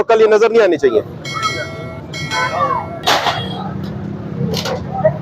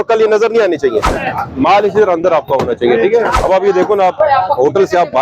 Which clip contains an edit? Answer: second; 2 cuts; at 1.2 s, 3.3 s

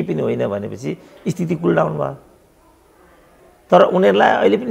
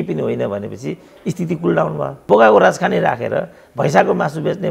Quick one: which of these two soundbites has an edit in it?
second; 1 cut; at 2.2 s

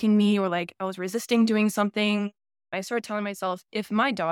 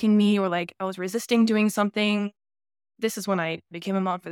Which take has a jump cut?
first; 1 cut; at 2.7 s

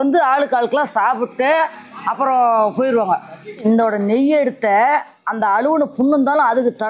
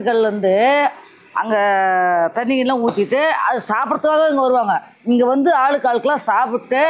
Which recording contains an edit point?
first; 1 cut; at 3.6 s

